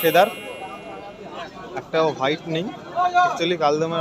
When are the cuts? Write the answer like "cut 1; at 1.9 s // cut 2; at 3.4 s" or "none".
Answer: none